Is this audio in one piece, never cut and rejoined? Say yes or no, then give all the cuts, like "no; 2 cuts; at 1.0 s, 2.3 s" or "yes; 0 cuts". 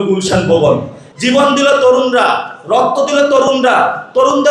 no; 1 cut; at 1.0 s